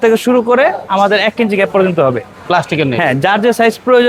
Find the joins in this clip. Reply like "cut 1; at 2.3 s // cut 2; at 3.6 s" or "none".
none